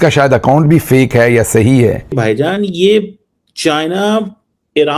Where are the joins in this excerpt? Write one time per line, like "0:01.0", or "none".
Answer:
0:02.2

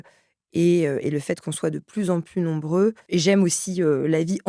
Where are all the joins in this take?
0:03.0

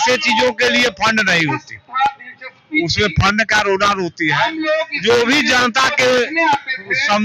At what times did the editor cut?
none

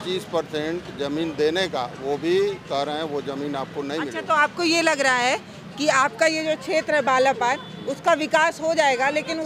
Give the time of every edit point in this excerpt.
none

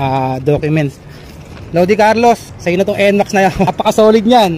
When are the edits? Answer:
0:02.5
0:03.7

